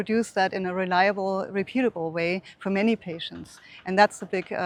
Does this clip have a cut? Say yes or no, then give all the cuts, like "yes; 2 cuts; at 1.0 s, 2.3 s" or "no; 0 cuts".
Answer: no; 0 cuts